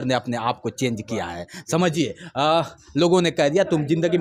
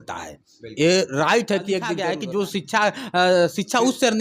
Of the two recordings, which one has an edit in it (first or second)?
second